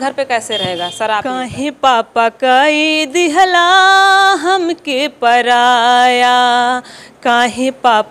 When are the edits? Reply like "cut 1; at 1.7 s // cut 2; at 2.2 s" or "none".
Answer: cut 1; at 1.5 s